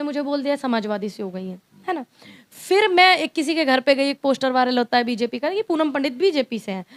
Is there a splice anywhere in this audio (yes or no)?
no